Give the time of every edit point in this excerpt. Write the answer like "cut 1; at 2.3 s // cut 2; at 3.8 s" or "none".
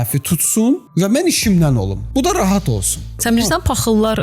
cut 1; at 0.9 s // cut 2; at 2.0 s // cut 3; at 3.2 s